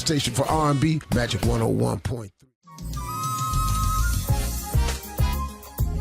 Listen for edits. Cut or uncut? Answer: cut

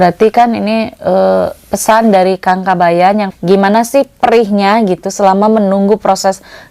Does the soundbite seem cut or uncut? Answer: cut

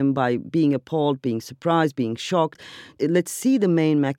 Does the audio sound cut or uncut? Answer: cut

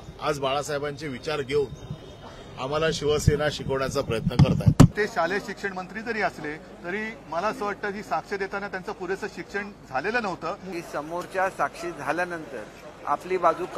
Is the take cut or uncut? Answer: cut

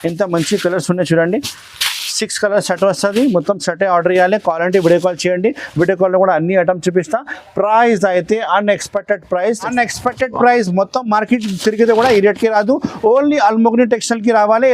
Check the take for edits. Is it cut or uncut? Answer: cut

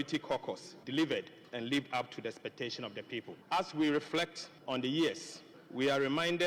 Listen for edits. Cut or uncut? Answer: uncut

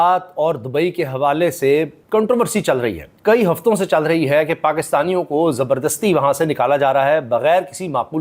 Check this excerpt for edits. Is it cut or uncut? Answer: uncut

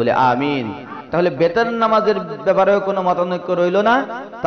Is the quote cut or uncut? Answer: cut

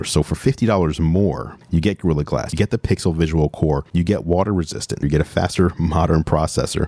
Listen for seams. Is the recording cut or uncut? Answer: cut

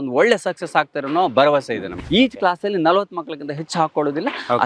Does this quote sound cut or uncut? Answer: cut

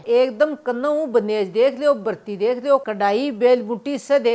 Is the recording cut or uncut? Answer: uncut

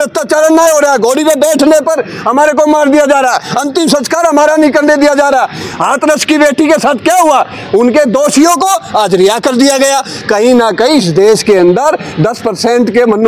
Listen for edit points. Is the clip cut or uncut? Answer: uncut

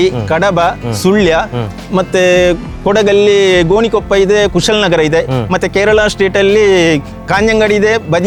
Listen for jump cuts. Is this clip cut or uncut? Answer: uncut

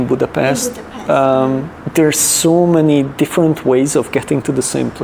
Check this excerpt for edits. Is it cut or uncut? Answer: cut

